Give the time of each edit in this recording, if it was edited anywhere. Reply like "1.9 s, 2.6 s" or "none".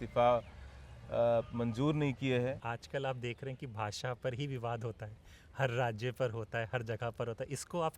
2.6 s